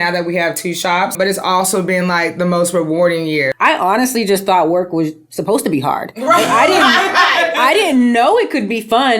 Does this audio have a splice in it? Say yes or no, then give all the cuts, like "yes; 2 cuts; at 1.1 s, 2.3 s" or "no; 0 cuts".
yes; 2 cuts; at 1.1 s, 3.5 s